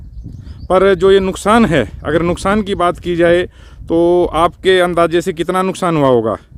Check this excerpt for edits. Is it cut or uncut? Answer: uncut